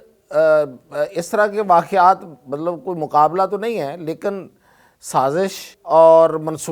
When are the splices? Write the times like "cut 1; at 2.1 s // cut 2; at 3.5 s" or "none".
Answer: cut 1; at 5.7 s

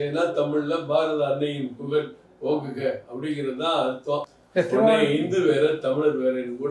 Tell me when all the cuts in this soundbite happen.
cut 1; at 4.4 s

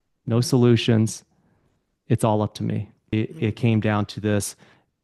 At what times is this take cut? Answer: cut 1; at 3.1 s

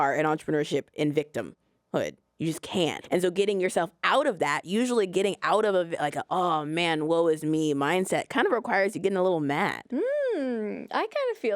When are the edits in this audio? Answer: cut 1; at 3.0 s // cut 2; at 9.8 s

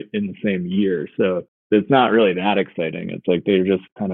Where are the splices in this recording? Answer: cut 1; at 1.5 s

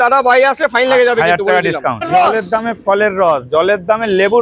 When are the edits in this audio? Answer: cut 1; at 2.1 s

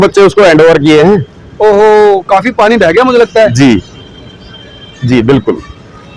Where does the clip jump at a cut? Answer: none

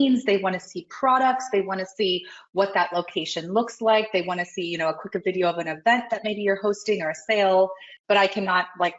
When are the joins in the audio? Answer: cut 1; at 7.9 s

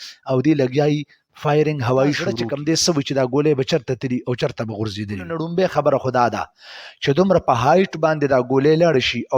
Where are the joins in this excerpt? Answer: cut 1; at 2.5 s // cut 2; at 5.4 s

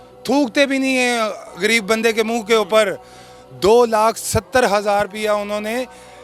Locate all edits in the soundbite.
none

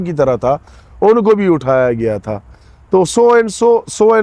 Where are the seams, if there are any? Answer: none

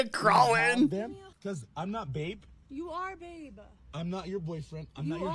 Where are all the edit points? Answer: cut 1; at 1.3 s

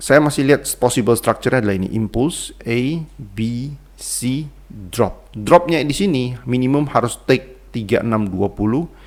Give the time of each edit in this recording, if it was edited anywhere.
none

